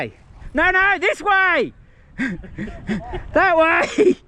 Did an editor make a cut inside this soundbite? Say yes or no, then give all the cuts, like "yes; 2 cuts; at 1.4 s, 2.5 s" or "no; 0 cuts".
no; 0 cuts